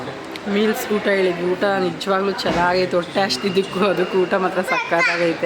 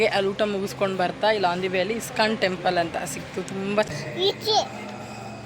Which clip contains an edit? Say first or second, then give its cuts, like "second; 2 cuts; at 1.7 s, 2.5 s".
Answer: second; 1 cut; at 3.9 s